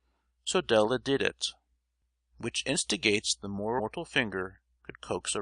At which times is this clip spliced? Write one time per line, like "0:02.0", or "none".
none

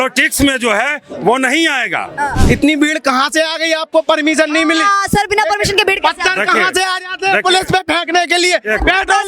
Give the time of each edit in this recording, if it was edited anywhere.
0:02.4

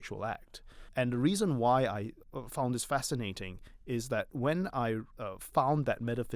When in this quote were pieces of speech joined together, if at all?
0:00.9
0:02.2
0:05.1

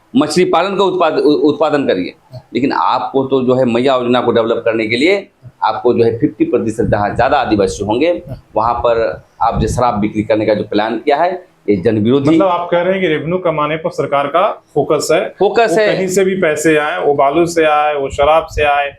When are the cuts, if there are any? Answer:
none

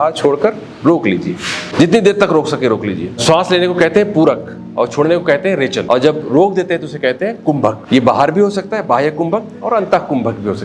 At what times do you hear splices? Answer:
0:01.6
0:03.2
0:05.8
0:07.8

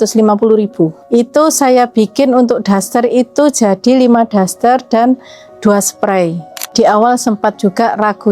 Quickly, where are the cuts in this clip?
0:01.0
0:06.6

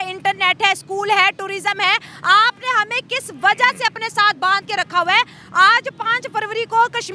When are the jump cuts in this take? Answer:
none

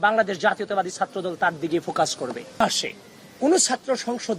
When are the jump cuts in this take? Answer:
0:02.6

